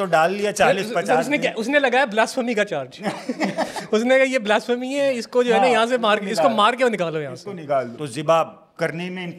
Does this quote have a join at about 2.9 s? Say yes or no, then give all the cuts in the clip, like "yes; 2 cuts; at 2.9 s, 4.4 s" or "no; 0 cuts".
no; 1 cut; at 8.0 s